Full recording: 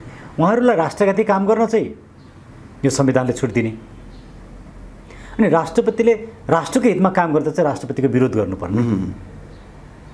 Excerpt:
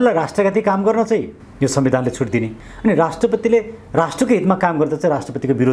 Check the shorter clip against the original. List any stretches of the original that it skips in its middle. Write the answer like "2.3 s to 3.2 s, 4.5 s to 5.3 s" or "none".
2.0 s to 2.6 s, 3.9 s to 5.2 s